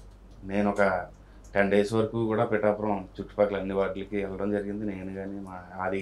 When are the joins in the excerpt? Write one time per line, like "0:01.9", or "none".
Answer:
none